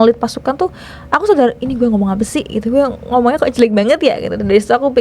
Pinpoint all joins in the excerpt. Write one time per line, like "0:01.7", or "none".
none